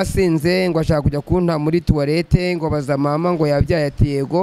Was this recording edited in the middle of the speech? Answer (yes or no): no